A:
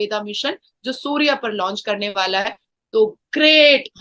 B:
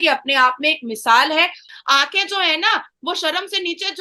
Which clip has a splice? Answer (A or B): B